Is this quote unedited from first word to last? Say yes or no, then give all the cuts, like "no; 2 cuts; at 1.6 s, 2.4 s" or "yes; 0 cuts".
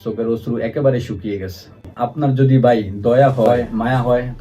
no; 1 cut; at 1.8 s